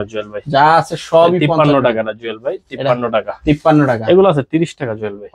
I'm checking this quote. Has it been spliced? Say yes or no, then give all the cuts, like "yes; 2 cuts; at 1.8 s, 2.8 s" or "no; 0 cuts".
no; 0 cuts